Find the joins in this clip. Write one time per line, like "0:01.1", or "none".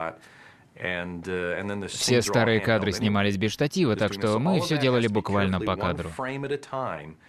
0:02.3